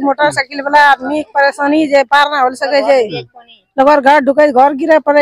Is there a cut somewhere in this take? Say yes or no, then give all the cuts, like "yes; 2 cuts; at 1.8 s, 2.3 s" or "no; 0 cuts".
no; 0 cuts